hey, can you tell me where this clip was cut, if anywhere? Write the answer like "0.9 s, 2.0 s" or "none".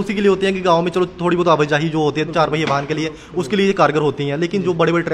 none